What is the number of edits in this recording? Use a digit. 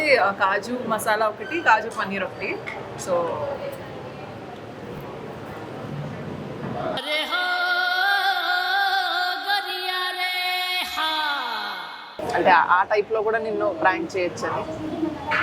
1